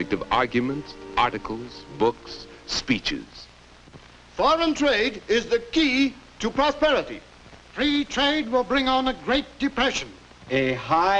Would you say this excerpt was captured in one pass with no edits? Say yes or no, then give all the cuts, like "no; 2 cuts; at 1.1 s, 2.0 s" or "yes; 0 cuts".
no; 1 cut; at 6.3 s